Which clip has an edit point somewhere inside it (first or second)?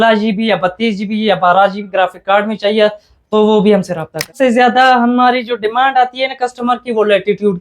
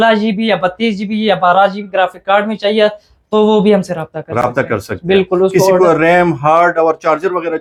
first